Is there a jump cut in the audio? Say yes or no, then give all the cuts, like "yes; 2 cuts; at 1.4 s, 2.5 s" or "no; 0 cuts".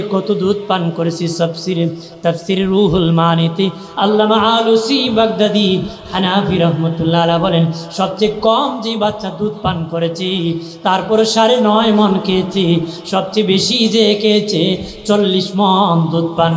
no; 0 cuts